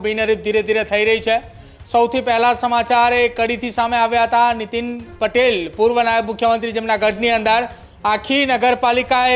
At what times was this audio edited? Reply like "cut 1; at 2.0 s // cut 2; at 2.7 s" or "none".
none